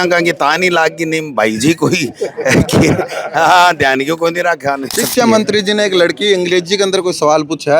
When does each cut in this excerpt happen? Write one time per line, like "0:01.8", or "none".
0:05.0